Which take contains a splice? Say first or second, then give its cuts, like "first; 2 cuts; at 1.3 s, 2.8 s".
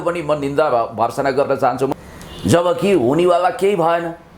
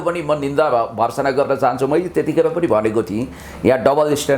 first; 1 cut; at 1.9 s